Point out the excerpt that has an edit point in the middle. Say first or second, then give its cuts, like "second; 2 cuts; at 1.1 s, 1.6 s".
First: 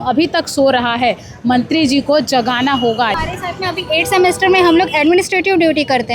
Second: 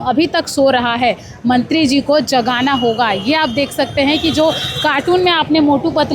first; 1 cut; at 3.2 s